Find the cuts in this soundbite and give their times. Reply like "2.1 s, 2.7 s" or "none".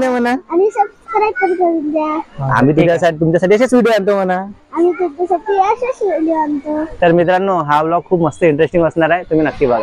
none